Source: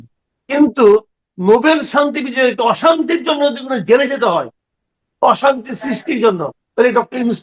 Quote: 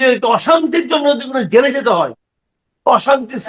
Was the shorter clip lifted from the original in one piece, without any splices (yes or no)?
yes